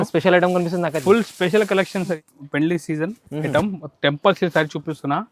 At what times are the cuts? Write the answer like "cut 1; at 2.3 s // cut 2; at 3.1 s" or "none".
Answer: cut 1; at 2.2 s